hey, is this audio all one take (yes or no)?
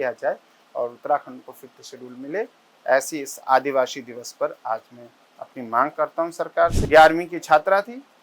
no